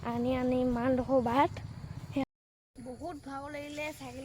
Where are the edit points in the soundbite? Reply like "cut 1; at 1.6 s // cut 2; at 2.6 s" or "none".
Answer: cut 1; at 2.3 s